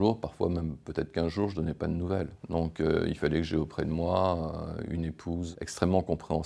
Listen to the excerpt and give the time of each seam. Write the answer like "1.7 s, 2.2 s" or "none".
none